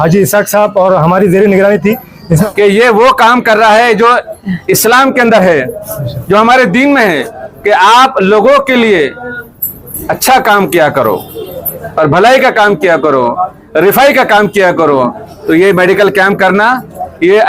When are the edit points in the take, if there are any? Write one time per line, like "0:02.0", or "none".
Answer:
0:02.4